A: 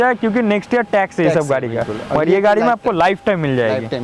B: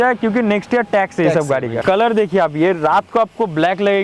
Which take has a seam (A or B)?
B